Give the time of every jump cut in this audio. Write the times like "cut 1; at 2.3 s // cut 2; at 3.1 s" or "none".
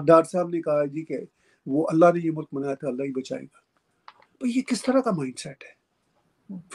none